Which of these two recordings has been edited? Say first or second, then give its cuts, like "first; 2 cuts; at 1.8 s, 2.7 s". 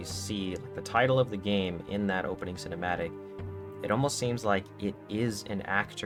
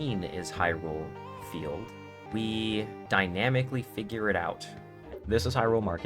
second; 3 cuts; at 2.2 s, 3.0 s, 5.1 s